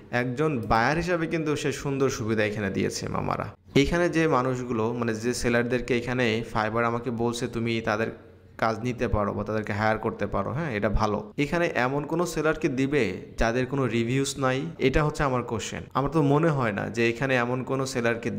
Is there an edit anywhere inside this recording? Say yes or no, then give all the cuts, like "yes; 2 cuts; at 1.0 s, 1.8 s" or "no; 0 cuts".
yes; 1 cut; at 3.5 s